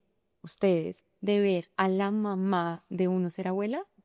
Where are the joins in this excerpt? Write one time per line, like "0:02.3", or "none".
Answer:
0:01.7